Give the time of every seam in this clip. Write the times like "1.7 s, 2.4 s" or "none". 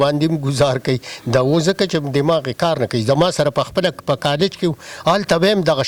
none

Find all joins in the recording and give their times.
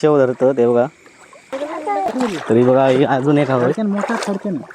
1.6 s

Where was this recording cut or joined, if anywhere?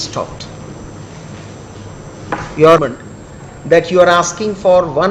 2.8 s

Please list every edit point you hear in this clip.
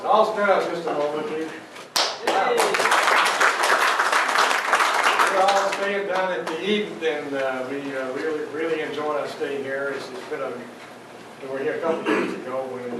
7.0 s

